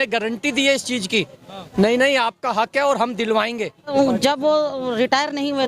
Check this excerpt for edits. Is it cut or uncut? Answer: cut